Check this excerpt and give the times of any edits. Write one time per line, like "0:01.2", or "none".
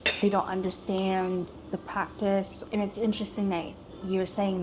0:02.6